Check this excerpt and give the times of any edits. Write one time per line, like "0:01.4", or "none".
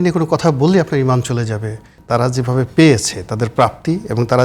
0:02.0